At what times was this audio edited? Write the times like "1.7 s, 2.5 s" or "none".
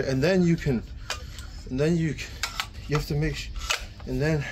2.7 s